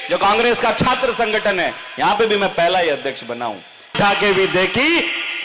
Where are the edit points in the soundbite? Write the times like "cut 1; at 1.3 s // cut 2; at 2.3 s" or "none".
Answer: cut 1; at 3.9 s